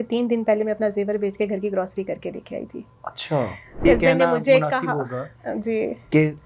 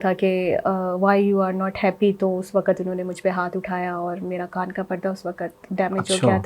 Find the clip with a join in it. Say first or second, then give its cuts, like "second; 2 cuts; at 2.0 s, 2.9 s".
first; 1 cut; at 3.8 s